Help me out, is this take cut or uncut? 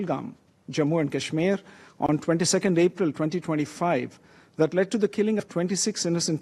uncut